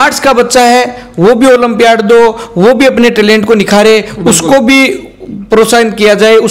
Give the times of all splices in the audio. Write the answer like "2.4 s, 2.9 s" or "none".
none

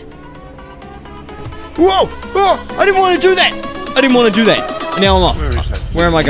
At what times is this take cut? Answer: none

